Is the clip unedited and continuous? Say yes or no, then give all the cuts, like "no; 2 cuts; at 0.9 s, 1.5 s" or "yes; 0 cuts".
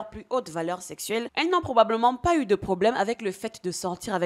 no; 1 cut; at 1.3 s